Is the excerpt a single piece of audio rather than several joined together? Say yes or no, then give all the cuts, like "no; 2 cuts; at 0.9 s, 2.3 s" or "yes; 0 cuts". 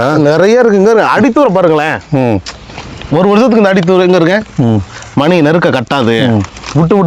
yes; 0 cuts